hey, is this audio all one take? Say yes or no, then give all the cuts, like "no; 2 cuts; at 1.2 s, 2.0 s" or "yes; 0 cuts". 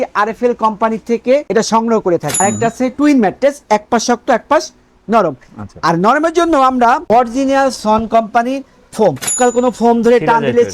no; 3 cuts; at 2.3 s, 7.0 s, 9.4 s